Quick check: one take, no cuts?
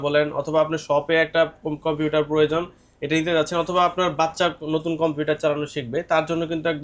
yes; 0 cuts

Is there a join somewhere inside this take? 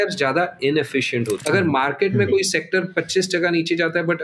yes; 1 cut; at 1.4 s

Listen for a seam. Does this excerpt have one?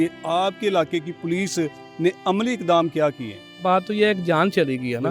yes; 1 cut; at 3.5 s

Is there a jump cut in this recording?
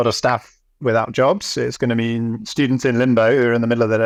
no; 0 cuts

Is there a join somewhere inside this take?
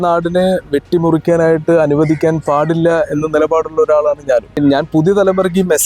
yes; 1 cut; at 4.6 s

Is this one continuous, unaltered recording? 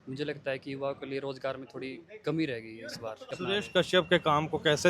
no; 1 cut; at 3.4 s

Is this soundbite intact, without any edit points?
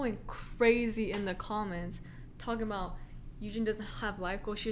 yes; 0 cuts

